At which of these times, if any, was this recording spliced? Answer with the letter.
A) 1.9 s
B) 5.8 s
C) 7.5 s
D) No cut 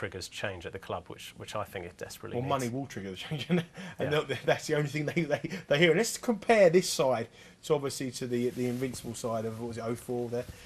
A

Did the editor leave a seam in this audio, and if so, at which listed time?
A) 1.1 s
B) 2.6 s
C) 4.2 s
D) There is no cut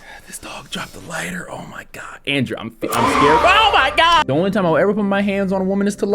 C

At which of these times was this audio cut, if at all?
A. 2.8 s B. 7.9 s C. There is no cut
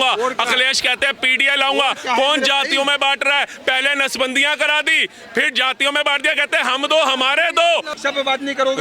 B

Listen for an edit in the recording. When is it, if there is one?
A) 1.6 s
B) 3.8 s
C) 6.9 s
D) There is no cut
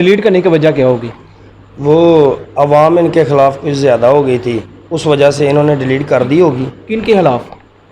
D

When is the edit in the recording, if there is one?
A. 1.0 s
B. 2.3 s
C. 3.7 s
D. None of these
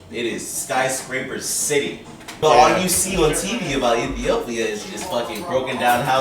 B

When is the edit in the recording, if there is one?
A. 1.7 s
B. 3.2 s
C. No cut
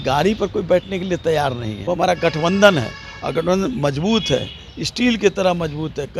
A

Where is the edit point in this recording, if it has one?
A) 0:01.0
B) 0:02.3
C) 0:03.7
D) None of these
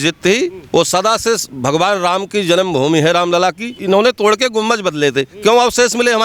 C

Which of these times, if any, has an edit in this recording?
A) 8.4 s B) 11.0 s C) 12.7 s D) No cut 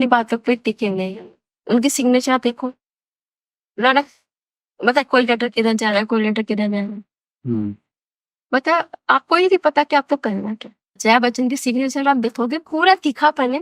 B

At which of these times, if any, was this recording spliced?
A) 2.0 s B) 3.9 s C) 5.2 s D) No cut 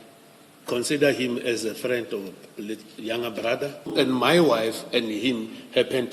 B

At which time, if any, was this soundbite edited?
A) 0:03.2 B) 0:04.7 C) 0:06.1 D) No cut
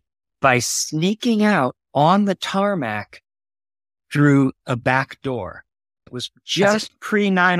C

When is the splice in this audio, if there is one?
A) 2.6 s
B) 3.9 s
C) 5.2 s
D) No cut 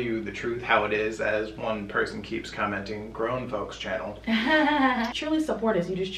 C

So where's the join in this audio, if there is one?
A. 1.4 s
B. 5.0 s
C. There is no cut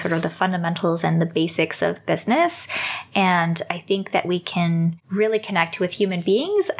B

